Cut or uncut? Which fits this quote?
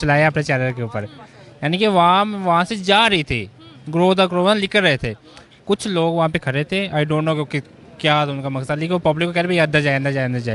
uncut